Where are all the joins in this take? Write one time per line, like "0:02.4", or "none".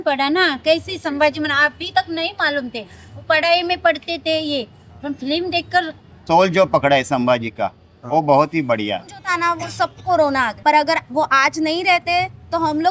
0:06.2
0:09.2
0:10.5